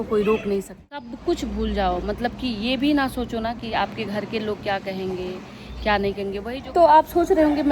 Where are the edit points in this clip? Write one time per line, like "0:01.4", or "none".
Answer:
0:01.1
0:06.5